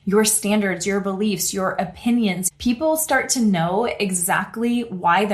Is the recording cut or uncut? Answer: cut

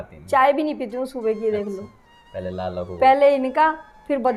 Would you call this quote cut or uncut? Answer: uncut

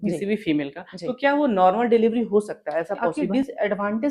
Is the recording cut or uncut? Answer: cut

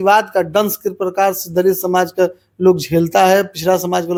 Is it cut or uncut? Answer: uncut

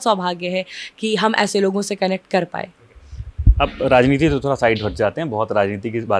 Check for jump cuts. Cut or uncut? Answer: uncut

